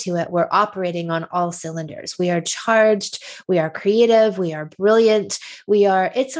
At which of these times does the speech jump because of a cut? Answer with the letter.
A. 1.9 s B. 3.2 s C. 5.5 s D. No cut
D